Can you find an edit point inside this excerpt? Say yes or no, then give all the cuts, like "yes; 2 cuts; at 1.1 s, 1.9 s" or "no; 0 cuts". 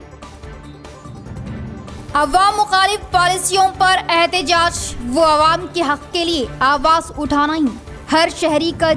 yes; 1 cut; at 1.9 s